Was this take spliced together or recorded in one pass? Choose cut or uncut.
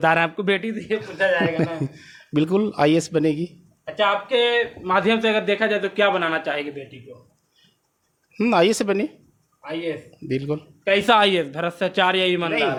uncut